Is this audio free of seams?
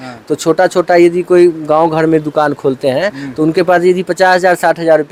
yes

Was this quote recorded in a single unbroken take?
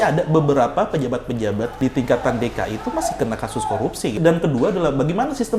no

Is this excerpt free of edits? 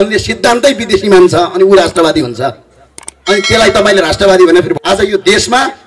no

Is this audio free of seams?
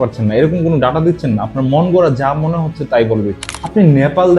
no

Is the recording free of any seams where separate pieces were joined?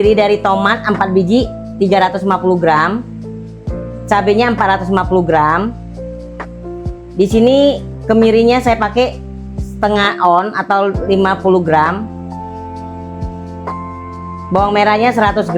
no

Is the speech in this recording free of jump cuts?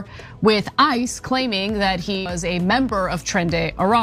yes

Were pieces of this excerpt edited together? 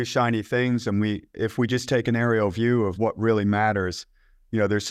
no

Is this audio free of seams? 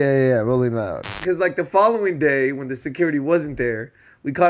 no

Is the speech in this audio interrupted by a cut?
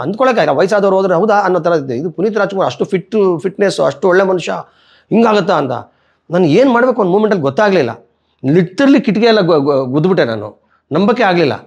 no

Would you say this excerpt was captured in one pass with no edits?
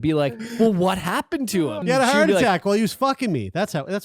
no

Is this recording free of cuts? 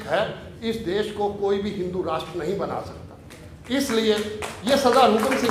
yes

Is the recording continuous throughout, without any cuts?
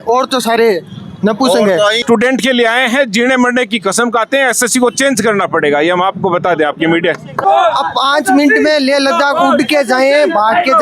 no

